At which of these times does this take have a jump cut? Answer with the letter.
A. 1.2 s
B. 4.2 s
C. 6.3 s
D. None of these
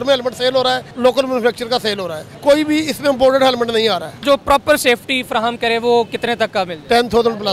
B